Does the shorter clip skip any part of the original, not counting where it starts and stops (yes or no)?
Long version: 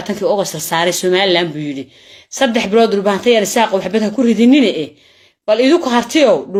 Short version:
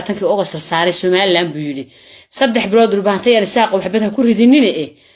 no